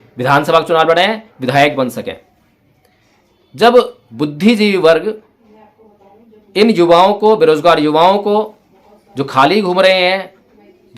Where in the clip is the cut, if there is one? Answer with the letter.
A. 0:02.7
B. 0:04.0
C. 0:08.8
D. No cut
B